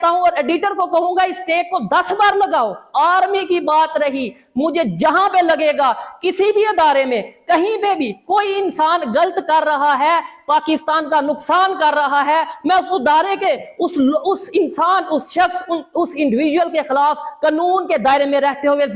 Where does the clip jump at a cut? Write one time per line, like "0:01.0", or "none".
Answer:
none